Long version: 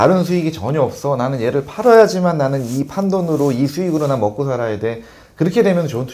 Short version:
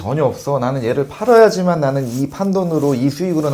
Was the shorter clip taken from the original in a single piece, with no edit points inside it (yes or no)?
yes